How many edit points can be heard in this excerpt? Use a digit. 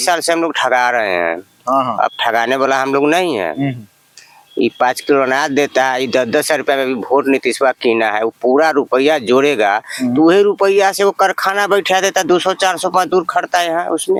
0